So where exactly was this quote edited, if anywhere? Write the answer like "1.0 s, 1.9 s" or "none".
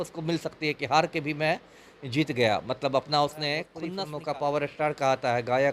3.8 s